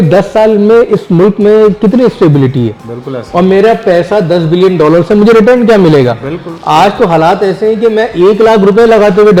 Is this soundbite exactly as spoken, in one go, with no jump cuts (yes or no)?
yes